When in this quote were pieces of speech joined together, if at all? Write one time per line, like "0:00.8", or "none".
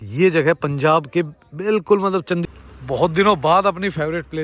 0:02.4